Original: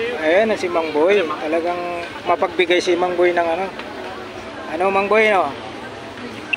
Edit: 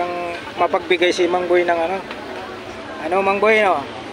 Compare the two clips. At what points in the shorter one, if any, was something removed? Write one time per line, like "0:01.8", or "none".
none